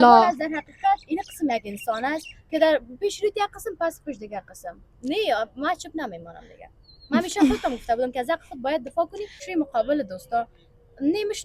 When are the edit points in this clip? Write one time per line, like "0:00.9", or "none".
0:09.4